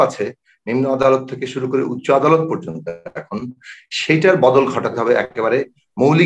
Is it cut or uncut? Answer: uncut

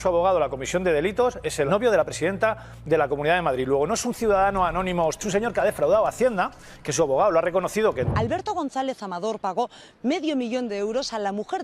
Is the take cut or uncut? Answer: cut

